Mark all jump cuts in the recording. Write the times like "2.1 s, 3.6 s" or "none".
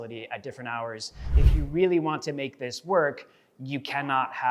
1.3 s